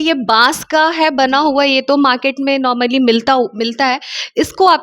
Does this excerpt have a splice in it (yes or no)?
no